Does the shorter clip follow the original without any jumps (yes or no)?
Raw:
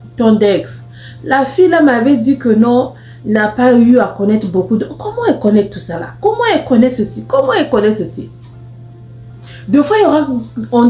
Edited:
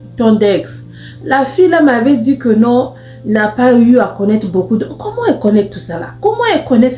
yes